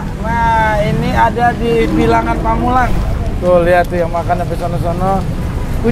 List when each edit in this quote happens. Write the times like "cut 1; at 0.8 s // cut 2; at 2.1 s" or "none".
cut 1; at 3.1 s